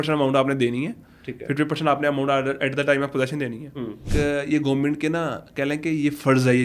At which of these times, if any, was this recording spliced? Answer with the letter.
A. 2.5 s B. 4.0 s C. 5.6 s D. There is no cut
B